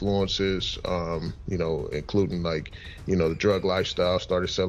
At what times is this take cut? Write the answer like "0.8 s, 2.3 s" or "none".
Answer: none

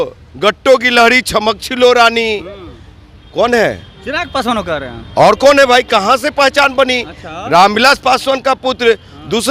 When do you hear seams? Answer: none

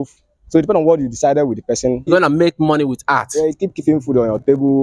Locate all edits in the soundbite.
2.1 s

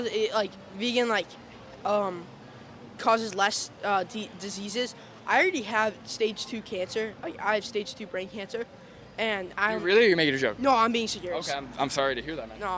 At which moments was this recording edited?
none

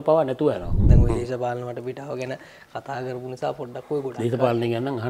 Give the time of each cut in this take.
1.0 s

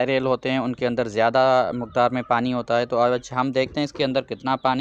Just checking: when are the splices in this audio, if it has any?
none

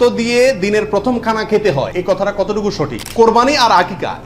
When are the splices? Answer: 1.9 s, 3.0 s

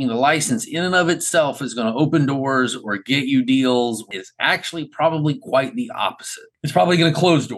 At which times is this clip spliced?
4.2 s

